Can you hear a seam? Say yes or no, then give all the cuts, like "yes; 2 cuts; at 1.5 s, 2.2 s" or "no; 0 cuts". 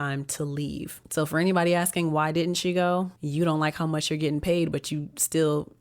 yes; 2 cuts; at 1.0 s, 3.2 s